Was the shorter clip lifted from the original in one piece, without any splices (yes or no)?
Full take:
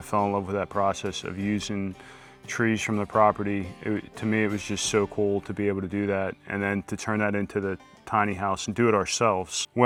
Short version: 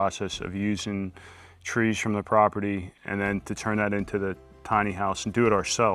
no